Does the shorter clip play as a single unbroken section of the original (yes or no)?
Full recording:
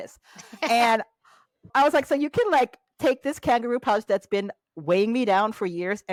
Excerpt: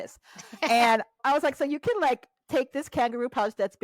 no